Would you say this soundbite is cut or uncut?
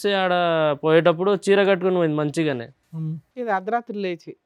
uncut